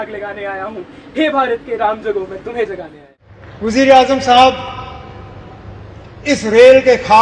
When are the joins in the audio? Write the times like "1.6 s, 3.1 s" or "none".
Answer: 3.3 s